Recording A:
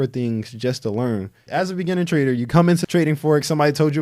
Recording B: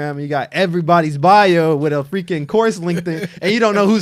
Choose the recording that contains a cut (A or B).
A